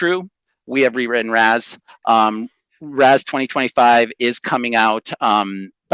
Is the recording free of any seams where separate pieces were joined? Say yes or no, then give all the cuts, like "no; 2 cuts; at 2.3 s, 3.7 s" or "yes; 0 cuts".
yes; 0 cuts